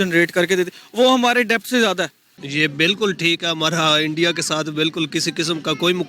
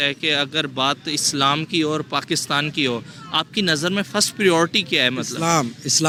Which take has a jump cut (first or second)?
first